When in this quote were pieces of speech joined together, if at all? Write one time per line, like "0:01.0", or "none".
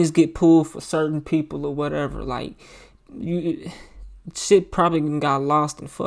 none